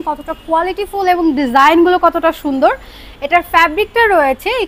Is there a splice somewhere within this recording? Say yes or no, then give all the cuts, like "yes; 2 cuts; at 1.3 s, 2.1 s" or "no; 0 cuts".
no; 0 cuts